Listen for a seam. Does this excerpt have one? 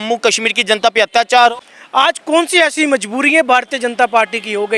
yes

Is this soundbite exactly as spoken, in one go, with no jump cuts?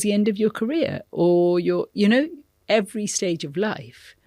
yes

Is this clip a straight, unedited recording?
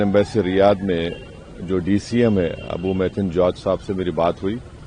yes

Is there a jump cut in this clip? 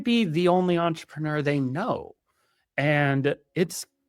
no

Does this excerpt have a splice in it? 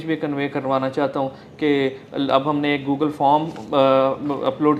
no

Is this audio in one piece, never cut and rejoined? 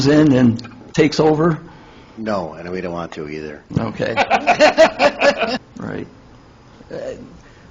no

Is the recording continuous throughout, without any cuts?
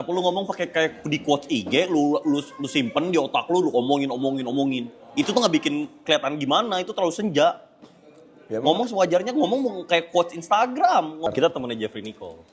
no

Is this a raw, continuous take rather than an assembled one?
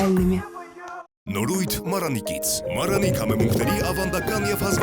no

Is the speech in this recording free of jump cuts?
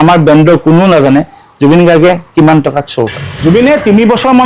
no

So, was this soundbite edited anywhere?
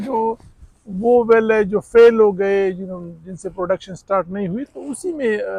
no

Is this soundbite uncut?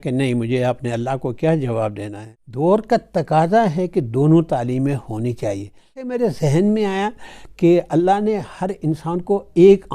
no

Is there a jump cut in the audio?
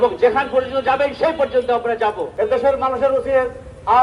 yes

